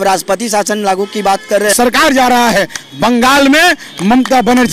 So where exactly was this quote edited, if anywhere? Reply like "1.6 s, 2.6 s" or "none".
1.7 s